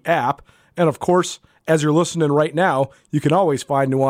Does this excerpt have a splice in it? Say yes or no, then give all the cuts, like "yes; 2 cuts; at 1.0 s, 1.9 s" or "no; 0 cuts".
no; 0 cuts